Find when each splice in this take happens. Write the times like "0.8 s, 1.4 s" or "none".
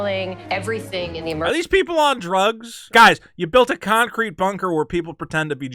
2.7 s